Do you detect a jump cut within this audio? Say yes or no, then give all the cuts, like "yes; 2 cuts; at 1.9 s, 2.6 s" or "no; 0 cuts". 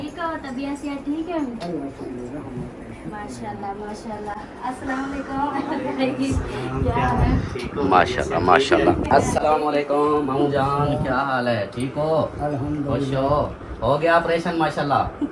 no; 0 cuts